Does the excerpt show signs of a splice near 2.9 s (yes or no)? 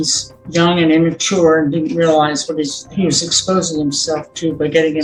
no